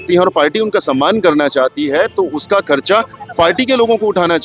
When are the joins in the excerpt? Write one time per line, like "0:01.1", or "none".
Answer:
none

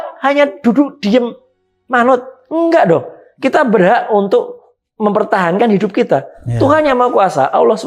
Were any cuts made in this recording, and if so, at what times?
none

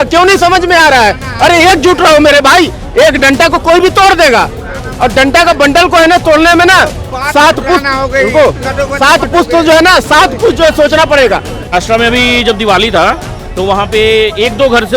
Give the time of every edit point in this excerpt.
0:11.7

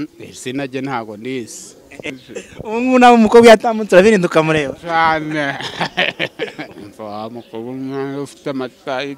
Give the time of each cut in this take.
0:02.1
0:06.8

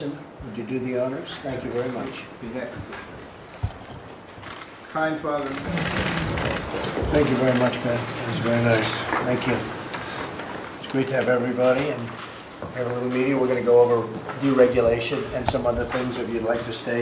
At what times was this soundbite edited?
0:05.6

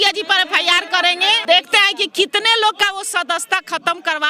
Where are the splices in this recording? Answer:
0:01.4

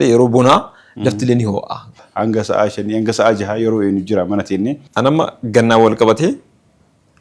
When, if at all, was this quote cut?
0:02.0
0:04.8

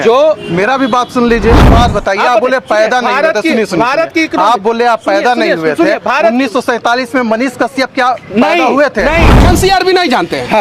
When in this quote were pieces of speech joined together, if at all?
0:01.6
0:09.4

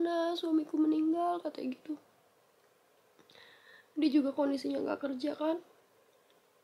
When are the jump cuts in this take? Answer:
none

